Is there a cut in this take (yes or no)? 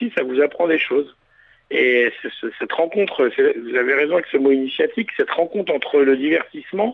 no